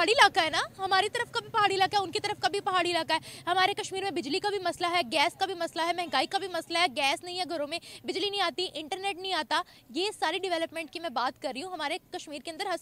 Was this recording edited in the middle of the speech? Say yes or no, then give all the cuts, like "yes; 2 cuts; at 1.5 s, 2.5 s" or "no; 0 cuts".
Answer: no; 0 cuts